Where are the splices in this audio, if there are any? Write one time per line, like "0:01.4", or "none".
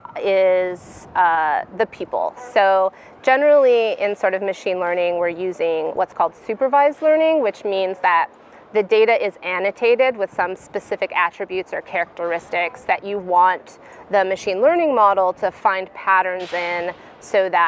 none